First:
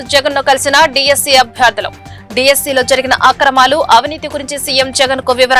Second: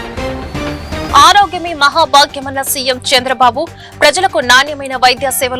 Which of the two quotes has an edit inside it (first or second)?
second